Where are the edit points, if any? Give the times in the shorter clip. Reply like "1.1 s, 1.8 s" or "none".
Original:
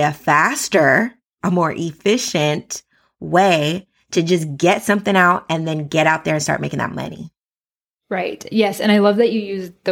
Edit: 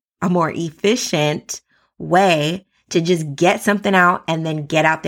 none